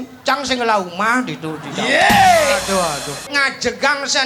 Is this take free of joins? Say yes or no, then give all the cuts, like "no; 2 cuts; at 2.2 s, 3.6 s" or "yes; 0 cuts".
no; 1 cut; at 3.2 s